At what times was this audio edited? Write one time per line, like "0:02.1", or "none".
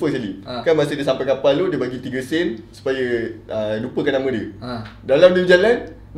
none

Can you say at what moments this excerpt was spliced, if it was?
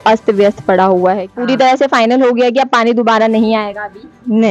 0:01.3

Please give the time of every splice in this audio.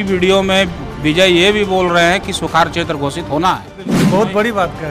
0:03.9

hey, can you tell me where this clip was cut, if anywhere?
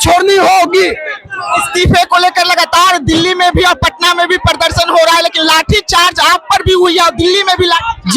none

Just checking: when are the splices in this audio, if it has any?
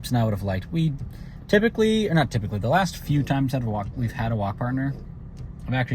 none

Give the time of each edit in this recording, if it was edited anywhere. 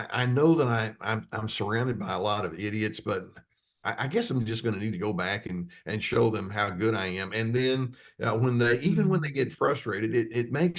none

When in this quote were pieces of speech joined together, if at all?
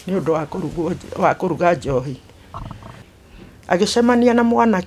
0:03.0

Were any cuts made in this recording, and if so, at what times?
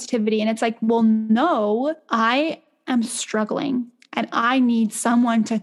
0:02.0

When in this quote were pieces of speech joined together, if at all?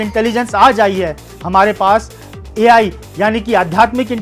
none

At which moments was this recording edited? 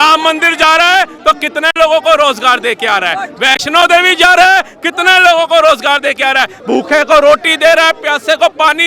0:06.5

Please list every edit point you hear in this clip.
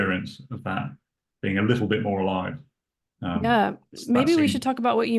none

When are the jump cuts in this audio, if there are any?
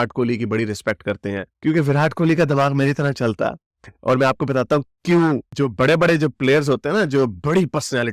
0:01.5
0:05.5

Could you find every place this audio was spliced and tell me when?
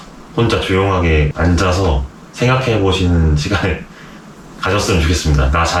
none

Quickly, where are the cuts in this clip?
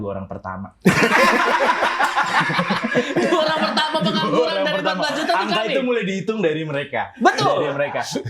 none

